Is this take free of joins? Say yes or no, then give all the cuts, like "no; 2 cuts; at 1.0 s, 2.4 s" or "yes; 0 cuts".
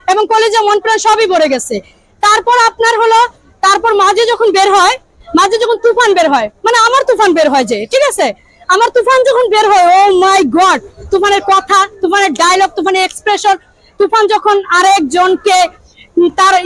yes; 0 cuts